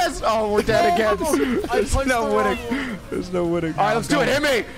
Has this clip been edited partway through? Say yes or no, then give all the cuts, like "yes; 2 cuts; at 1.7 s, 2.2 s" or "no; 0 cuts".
yes; 2 cuts; at 1.7 s, 3.7 s